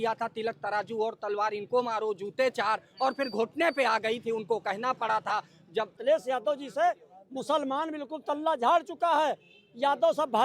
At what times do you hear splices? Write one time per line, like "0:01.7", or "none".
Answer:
0:06.0